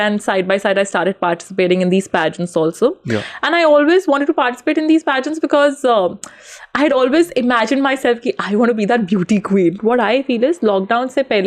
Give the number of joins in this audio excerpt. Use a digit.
1